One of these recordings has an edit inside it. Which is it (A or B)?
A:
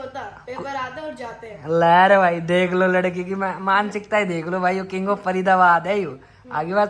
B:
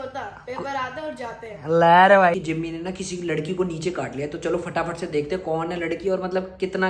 B